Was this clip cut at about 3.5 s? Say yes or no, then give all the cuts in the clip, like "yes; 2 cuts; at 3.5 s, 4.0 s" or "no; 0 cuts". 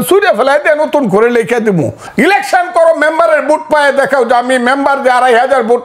no; 1 cut; at 2.0 s